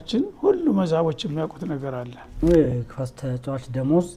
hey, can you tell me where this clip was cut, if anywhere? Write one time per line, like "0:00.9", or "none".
0:02.4